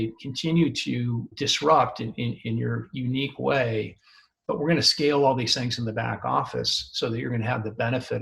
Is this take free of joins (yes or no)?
no